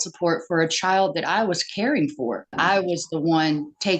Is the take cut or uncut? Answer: cut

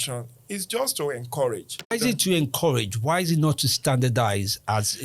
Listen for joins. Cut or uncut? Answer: cut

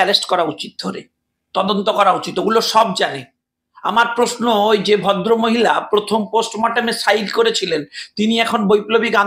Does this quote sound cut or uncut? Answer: uncut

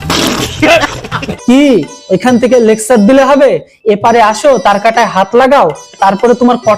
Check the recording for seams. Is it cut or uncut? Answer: cut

